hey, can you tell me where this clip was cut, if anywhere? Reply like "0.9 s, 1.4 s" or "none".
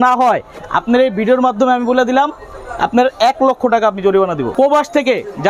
4.5 s